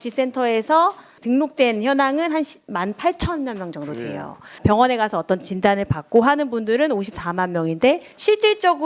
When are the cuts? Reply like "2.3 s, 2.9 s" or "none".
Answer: 1.1 s